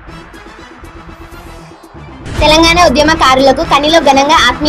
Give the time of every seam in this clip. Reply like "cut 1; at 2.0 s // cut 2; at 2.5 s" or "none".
cut 1; at 2.2 s

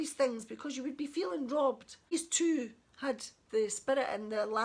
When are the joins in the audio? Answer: cut 1; at 2.1 s

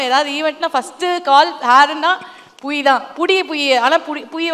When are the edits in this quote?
none

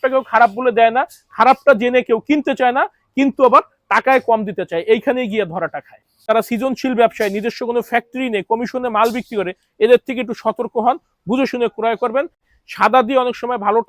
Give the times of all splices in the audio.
cut 1; at 6.3 s // cut 2; at 12.4 s

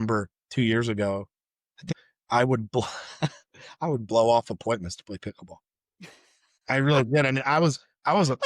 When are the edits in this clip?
cut 1; at 1.8 s

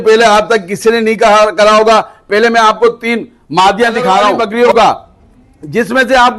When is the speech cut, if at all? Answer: cut 1; at 4.4 s

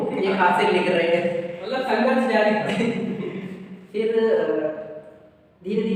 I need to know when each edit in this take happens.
none

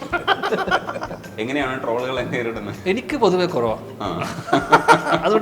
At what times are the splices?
cut 1; at 1.3 s // cut 2; at 2.7 s

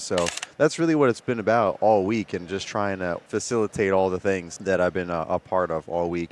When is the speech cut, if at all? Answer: cut 1; at 3.3 s // cut 2; at 4.5 s

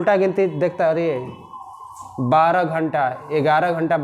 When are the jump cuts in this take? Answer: none

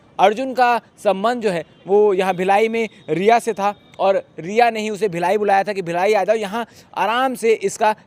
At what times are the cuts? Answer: none

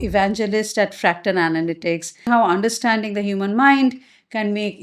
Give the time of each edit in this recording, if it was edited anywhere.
cut 1; at 2.3 s

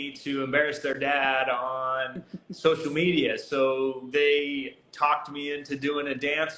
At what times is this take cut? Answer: none

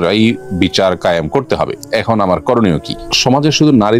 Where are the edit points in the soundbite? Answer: cut 1; at 1.8 s // cut 2; at 2.9 s

